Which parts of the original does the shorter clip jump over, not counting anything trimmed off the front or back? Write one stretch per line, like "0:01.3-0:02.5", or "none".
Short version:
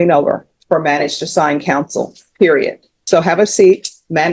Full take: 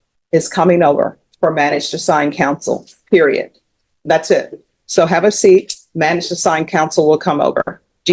0:03.6-0:04.7